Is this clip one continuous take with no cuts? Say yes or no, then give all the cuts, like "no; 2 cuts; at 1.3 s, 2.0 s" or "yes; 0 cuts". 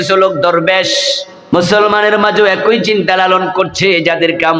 no; 1 cut; at 1.3 s